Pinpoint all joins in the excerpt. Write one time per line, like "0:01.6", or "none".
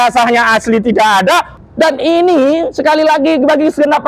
0:01.5